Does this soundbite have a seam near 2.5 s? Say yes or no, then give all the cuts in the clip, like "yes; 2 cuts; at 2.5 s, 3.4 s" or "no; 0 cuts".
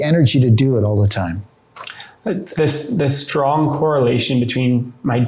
yes; 1 cut; at 2.5 s